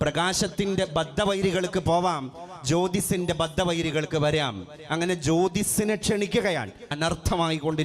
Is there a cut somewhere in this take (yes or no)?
yes